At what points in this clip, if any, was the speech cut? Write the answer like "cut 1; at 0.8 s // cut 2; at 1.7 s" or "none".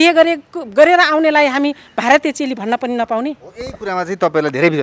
none